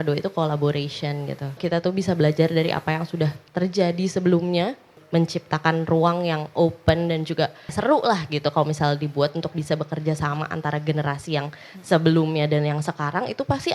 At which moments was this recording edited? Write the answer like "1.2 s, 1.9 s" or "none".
1.6 s, 5.0 s, 7.7 s